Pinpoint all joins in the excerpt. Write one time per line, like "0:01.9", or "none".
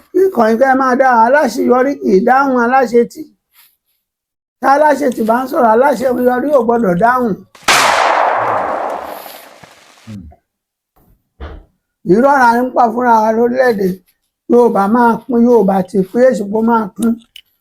0:11.2